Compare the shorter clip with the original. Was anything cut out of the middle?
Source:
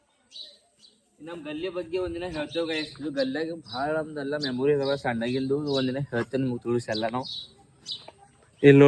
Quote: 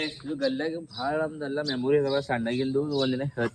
no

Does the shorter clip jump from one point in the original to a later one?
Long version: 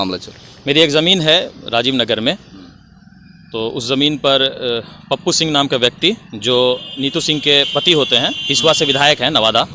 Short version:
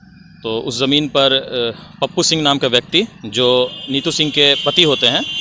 no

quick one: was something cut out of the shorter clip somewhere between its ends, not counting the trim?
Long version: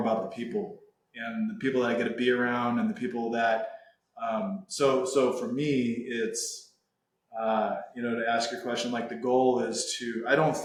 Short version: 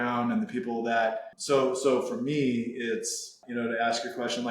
yes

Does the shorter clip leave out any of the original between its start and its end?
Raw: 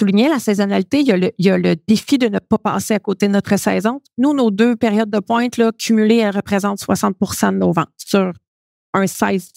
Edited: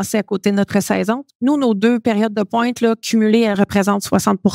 no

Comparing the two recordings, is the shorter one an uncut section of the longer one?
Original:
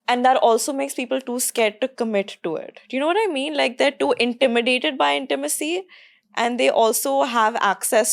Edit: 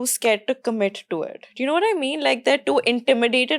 yes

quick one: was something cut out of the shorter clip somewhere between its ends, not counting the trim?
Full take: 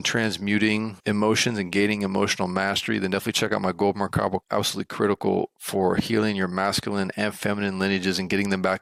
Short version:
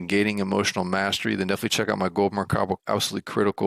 no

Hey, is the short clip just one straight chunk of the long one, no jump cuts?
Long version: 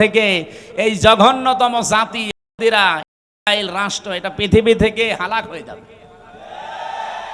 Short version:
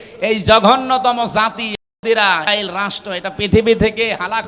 no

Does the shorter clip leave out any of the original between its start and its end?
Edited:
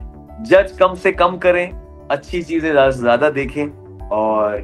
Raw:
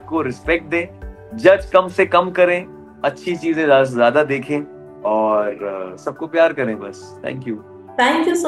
no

